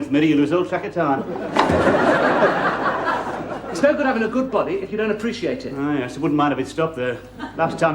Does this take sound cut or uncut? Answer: cut